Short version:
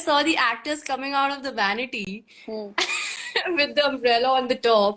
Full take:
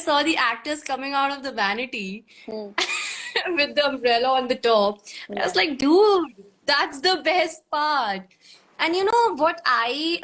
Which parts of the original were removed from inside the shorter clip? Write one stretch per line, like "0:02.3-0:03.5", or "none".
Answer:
none